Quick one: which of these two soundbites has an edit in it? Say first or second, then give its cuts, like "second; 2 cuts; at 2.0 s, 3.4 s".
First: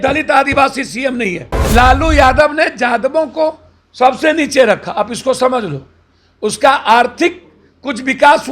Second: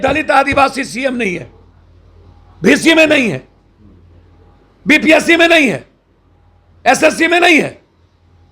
first; 1 cut; at 1.6 s